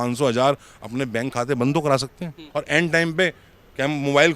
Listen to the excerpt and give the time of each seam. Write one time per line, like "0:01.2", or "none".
0:02.4